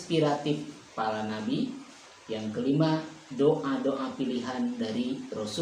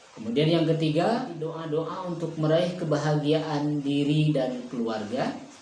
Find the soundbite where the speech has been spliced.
second; 1 cut; at 1.6 s

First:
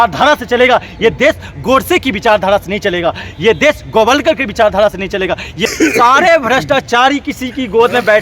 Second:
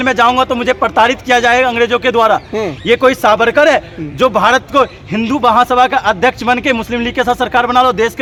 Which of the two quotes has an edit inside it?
first; 1 cut; at 5.7 s

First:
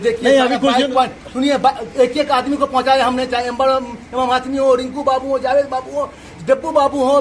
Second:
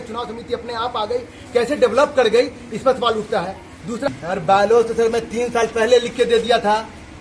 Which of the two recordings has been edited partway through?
second; 1 cut; at 4.1 s

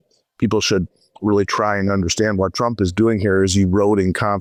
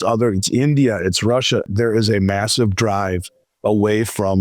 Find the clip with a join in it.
second; 1 cut; at 1.7 s

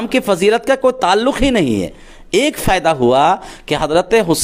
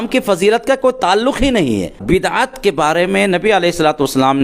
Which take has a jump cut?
second; 1 cut; at 2.0 s

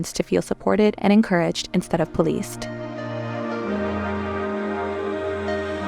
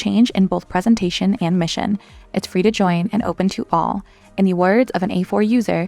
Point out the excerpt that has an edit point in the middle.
first; 1 cut; at 2.6 s

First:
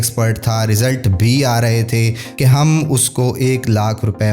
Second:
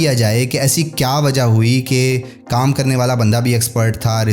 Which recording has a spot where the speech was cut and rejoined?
first; 1 cut; at 2.4 s

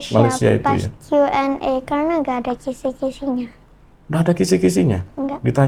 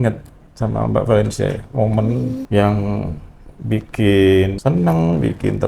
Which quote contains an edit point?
second; 2 cuts; at 2.4 s, 4.5 s

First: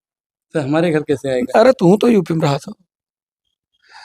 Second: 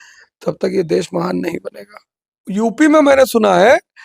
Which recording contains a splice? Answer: second; 1 cut; at 2.0 s

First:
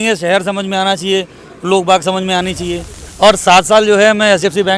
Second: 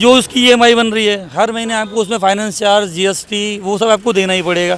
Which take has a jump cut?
first; 1 cut; at 3.0 s

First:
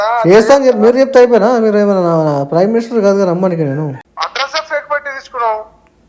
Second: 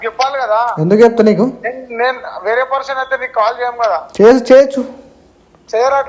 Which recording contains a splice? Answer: first; 1 cut; at 4.0 s

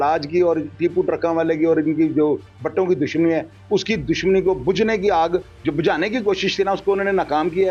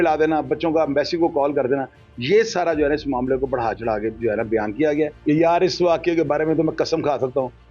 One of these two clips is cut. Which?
second; 1 cut; at 5.2 s

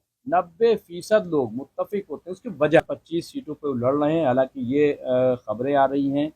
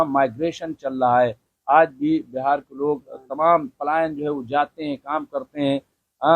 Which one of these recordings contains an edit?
first; 1 cut; at 2.9 s

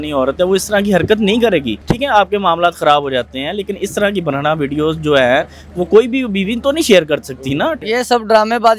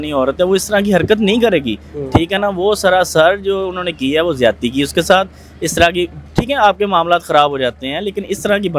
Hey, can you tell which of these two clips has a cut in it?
first; 2 cuts; at 1.8 s, 7.8 s

